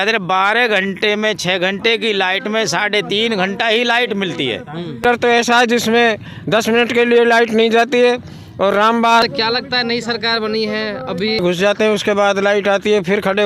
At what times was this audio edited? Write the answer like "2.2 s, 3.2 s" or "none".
5.0 s, 9.2 s, 11.4 s